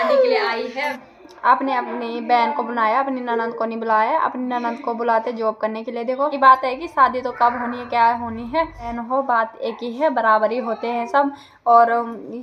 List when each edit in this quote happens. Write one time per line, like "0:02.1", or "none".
0:01.0
0:06.3
0:09.0